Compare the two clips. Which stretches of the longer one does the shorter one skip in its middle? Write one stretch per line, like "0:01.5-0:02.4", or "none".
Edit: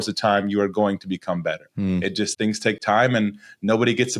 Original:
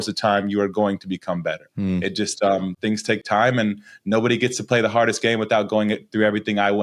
0:02.3-0:02.8